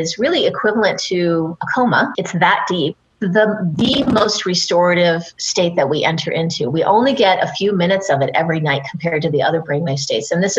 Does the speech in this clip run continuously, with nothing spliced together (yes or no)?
yes